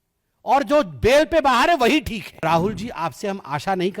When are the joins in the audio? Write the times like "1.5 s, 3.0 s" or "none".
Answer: 2.4 s